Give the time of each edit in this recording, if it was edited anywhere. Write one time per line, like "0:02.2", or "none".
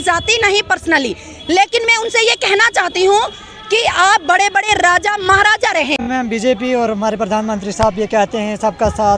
0:06.0